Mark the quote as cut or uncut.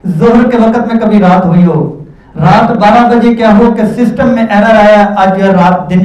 uncut